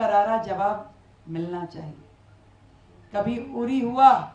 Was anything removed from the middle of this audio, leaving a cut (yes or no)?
no